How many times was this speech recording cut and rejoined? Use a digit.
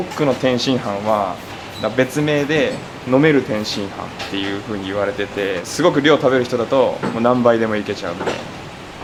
0